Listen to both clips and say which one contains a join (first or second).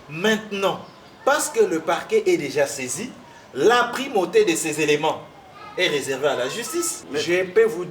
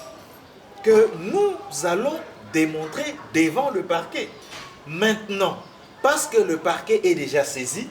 first